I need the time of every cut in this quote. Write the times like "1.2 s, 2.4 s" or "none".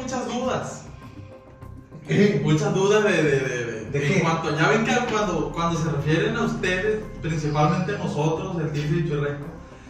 none

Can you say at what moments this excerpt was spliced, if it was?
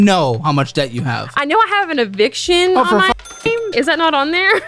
3.7 s

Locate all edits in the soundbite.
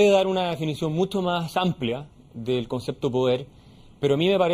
none

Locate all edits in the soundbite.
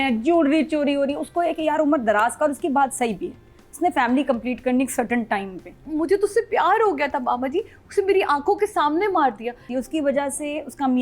5.8 s, 9.7 s

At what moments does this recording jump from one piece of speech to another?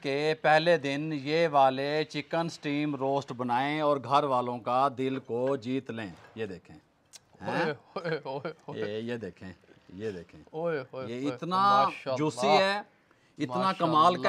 none

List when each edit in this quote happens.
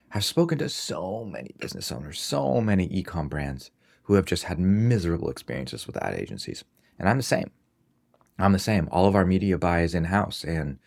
none

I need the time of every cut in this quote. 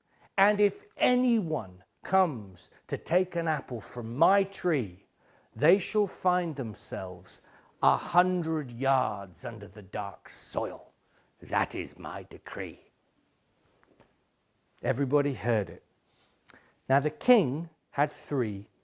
2.8 s

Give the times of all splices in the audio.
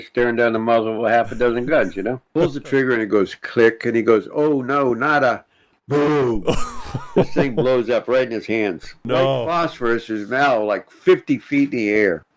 2.2 s, 9.0 s

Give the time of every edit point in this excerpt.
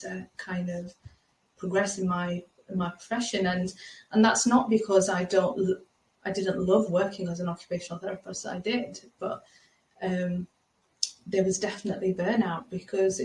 none

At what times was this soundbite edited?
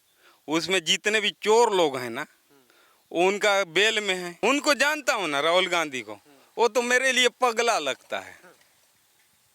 4.3 s

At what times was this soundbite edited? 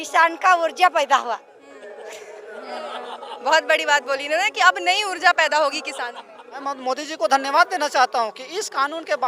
6.5 s

